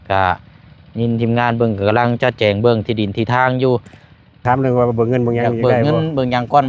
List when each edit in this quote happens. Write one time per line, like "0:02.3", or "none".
0:04.4